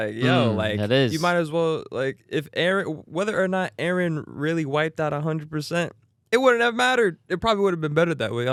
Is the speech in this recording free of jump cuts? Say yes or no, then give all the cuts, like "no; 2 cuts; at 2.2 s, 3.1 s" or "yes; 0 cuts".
yes; 0 cuts